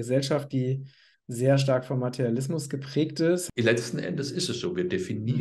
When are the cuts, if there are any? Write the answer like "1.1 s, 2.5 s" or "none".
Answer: 3.4 s

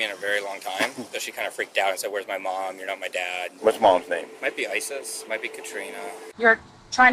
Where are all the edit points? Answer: 1.2 s, 3.5 s, 4.4 s, 6.2 s

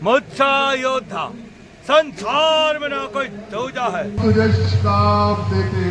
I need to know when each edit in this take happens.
4.2 s

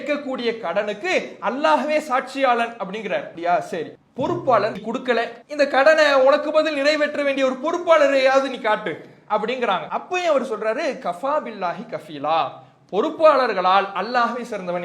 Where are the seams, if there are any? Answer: 3.3 s, 4.0 s, 4.8 s, 9.9 s

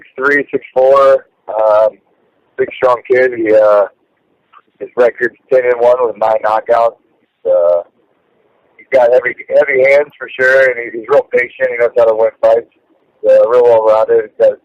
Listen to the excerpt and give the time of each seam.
7.3 s

